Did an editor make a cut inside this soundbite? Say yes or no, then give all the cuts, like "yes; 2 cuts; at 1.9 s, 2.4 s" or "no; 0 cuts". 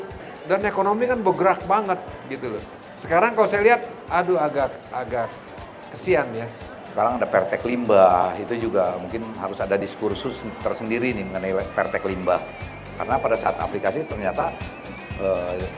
yes; 1 cut; at 6.8 s